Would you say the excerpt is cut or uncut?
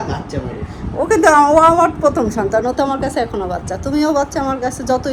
uncut